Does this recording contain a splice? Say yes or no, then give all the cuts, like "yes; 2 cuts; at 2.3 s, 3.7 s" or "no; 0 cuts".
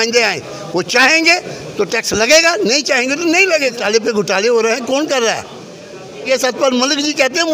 yes; 2 cuts; at 3.8 s, 6.2 s